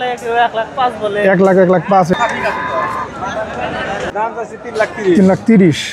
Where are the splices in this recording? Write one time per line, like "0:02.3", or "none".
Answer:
0:02.1
0:04.1